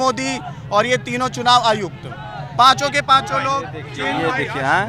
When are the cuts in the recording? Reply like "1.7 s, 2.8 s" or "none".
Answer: none